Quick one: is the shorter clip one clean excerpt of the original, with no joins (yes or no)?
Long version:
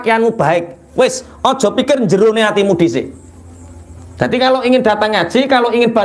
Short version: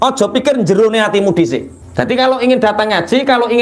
no